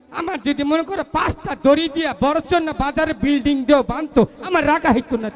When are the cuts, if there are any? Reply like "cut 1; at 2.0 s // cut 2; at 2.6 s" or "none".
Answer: none